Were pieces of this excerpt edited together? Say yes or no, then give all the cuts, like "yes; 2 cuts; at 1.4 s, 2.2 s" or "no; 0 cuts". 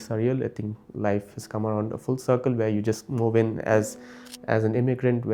no; 0 cuts